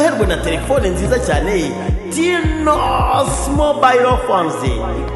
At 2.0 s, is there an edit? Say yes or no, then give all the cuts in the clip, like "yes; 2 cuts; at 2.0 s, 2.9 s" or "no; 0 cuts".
no; 0 cuts